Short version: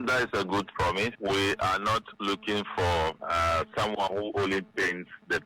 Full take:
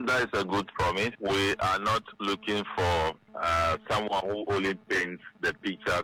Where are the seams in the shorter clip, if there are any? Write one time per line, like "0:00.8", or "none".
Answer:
0:03.2